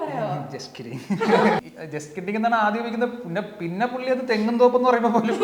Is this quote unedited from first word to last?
no; 1 cut; at 1.6 s

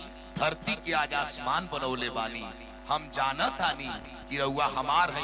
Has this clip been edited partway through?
no; 0 cuts

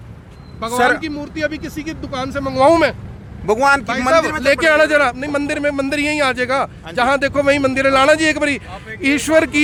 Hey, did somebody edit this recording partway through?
no; 0 cuts

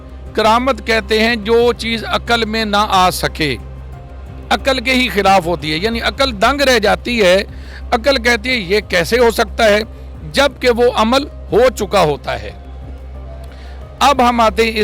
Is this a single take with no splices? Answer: yes; 0 cuts

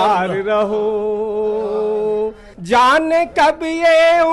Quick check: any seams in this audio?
yes; 1 cut; at 2.5 s

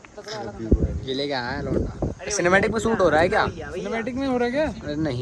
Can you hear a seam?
no; 0 cuts

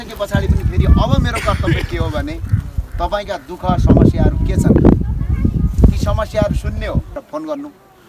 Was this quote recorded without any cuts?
yes; 0 cuts

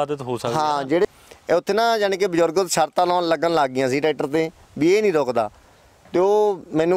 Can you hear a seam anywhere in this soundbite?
yes; 2 cuts; at 1.1 s, 5.7 s

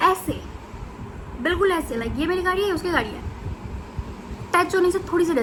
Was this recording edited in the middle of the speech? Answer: no; 0 cuts

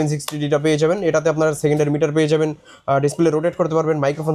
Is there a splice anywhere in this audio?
no; 0 cuts

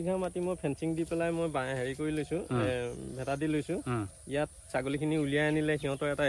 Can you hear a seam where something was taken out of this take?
no; 0 cuts

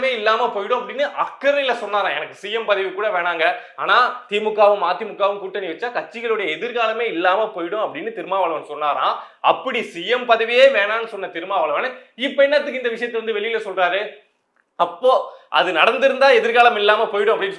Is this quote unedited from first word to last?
yes; 0 cuts

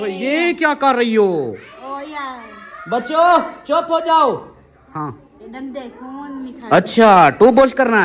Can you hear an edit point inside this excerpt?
no; 0 cuts

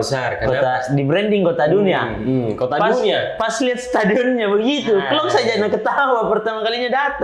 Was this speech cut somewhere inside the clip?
no; 0 cuts

